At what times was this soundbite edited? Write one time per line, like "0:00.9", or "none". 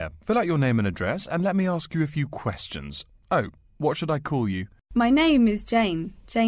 0:04.7